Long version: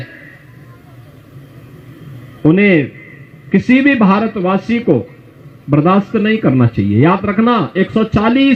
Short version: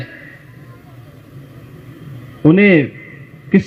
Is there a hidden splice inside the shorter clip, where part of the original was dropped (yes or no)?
no